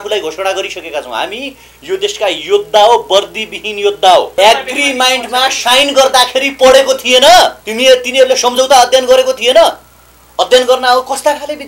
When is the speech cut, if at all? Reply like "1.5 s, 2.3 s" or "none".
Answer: 4.3 s, 7.6 s